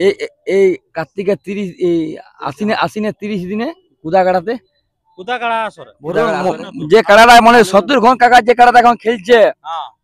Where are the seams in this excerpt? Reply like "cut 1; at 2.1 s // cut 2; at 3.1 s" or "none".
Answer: cut 1; at 6.2 s